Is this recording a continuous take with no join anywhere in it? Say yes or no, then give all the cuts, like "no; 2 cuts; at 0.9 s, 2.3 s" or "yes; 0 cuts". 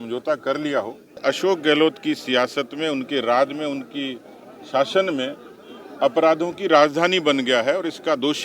no; 1 cut; at 1.2 s